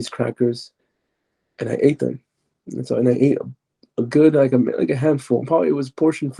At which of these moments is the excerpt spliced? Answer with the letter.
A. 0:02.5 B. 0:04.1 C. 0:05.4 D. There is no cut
C